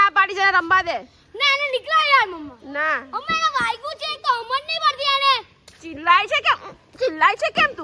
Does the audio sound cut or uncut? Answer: uncut